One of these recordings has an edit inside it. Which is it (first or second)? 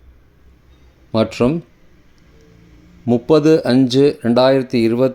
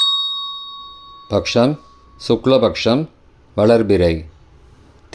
second